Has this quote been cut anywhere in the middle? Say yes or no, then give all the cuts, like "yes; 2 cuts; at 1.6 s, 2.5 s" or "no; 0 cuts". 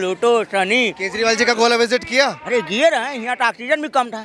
no; 0 cuts